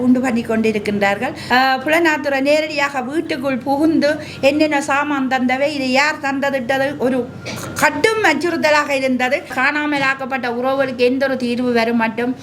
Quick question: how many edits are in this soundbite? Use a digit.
2